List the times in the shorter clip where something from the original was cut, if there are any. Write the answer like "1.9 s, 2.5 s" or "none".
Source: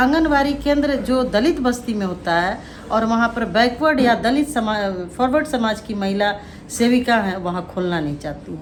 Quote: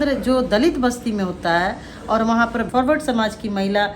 2.7 s